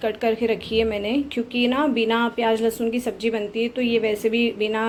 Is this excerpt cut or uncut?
uncut